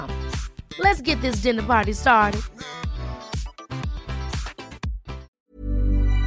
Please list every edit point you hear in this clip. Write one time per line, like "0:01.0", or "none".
0:05.3